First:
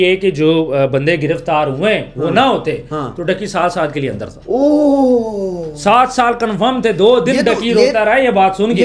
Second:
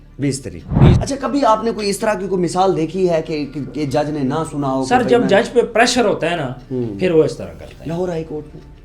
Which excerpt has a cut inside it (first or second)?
second